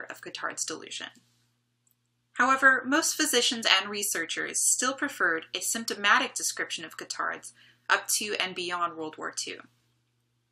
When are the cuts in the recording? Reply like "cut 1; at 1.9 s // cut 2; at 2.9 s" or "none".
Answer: none

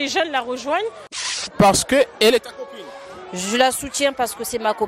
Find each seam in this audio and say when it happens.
cut 1; at 1.5 s

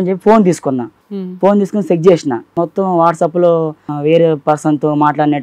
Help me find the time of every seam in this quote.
cut 1; at 1.0 s // cut 2; at 2.6 s // cut 3; at 3.9 s

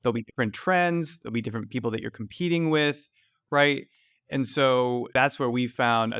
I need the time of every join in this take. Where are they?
cut 1; at 5.1 s

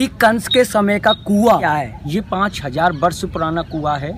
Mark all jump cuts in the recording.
cut 1; at 1.6 s

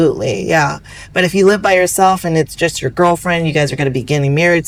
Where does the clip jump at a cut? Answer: none

